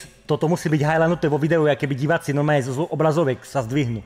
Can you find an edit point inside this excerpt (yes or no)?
no